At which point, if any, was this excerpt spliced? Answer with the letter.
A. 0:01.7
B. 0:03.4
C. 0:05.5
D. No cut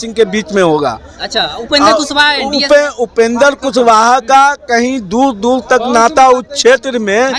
D